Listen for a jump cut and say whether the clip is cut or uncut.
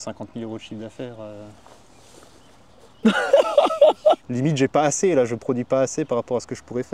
cut